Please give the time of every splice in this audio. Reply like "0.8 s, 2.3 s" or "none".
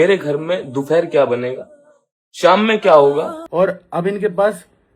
3.4 s